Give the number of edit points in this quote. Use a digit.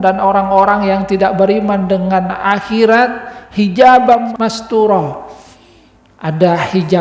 1